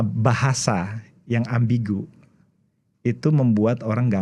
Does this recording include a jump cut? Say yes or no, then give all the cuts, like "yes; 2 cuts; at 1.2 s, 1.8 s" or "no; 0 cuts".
no; 0 cuts